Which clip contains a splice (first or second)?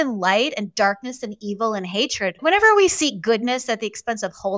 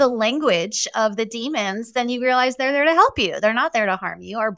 first